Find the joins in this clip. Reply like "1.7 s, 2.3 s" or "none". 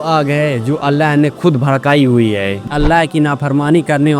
2.6 s